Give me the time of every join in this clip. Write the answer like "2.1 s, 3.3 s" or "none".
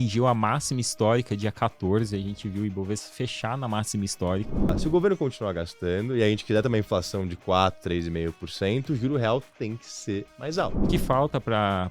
4.8 s, 10.9 s